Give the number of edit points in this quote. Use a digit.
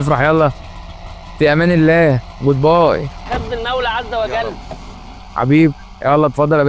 0